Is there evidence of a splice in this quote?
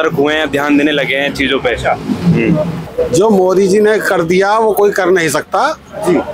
yes; 1 cut; at 2.9 s

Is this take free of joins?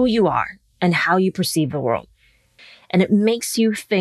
no; 1 cut; at 2.3 s

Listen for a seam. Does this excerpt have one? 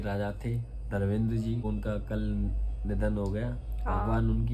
yes; 1 cut; at 1.6 s

